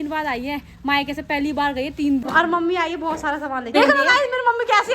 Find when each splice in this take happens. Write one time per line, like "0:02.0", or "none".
0:02.2
0:03.8